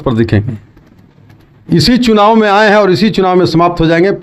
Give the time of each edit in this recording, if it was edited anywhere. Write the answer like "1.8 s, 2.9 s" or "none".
none